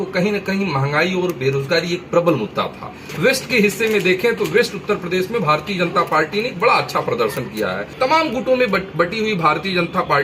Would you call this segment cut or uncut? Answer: cut